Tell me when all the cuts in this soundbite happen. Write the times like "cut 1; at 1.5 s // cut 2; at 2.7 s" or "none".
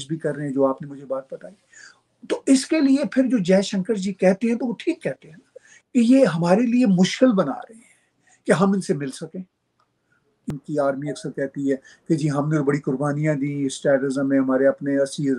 cut 1; at 10.5 s